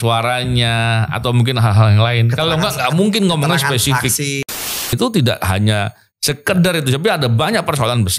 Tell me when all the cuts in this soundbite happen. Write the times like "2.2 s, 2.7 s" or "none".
4.9 s